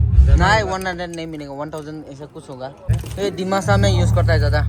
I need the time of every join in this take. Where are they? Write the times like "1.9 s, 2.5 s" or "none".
3.0 s